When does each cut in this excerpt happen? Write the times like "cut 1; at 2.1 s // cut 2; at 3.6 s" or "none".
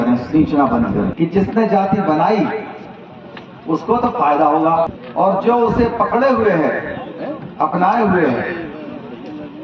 cut 1; at 1.1 s // cut 2; at 5.0 s